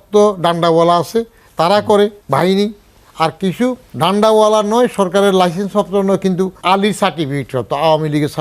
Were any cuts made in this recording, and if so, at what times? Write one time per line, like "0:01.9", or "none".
0:02.2
0:03.9
0:06.6